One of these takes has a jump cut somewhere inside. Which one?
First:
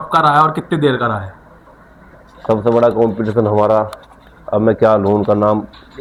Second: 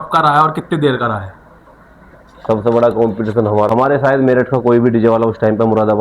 second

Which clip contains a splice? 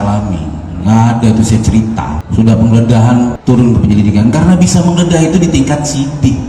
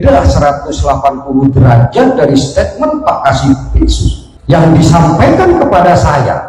first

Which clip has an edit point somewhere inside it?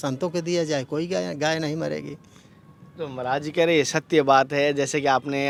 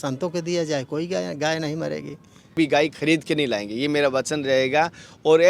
second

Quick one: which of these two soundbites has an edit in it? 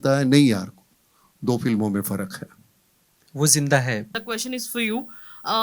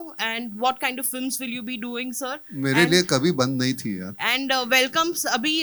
first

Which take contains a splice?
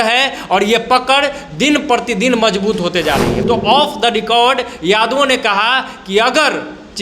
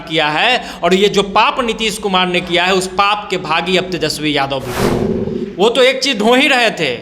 first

